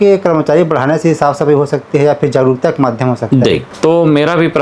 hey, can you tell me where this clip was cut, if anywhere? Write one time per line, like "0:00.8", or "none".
0:03.7